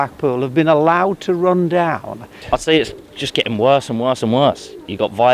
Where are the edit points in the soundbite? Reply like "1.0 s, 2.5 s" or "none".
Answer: 2.3 s